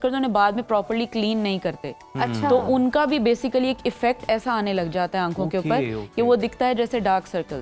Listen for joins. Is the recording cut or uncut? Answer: uncut